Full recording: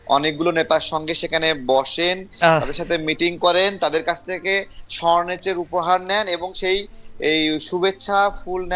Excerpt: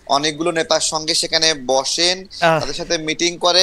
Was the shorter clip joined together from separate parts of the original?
no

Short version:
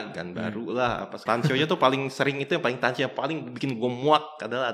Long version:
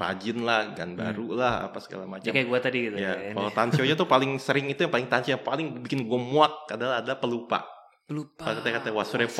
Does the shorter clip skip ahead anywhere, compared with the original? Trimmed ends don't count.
yes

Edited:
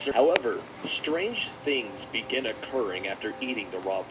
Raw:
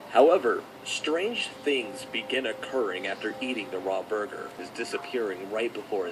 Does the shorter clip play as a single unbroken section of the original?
yes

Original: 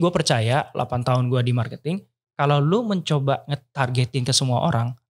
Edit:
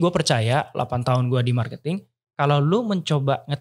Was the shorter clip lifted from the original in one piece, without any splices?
yes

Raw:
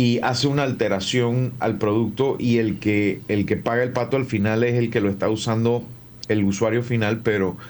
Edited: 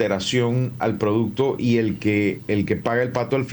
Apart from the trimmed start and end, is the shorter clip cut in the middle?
no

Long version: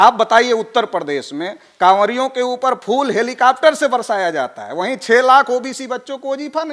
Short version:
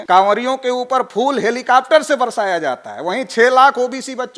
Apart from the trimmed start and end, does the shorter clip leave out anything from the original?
no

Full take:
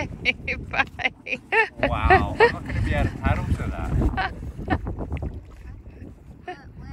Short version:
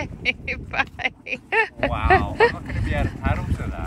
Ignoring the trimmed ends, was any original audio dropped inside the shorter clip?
no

